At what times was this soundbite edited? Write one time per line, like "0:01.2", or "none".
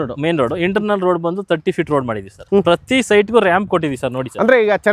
0:02.4